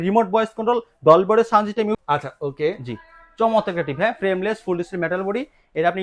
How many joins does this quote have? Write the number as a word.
one